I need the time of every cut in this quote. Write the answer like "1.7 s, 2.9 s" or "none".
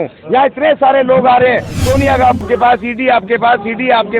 2.4 s